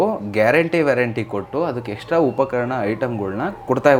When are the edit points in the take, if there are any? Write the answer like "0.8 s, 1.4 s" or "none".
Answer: none